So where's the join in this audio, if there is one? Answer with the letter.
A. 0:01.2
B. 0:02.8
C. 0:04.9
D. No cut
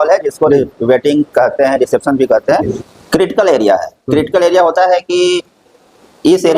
B